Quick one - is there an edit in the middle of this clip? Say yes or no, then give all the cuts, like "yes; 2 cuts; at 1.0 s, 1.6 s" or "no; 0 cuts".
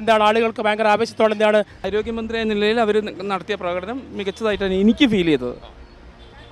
yes; 1 cut; at 1.8 s